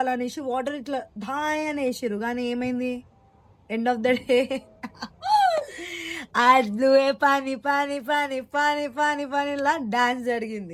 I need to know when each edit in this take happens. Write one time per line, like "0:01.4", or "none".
none